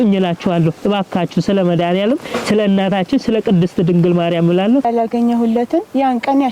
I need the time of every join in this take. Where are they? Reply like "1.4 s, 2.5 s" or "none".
4.8 s